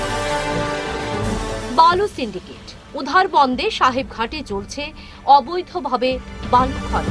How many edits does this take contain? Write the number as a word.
one